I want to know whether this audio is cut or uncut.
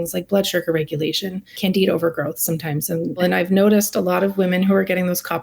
cut